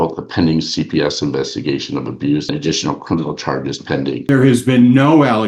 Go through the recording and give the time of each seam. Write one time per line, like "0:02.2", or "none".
0:02.5
0:04.2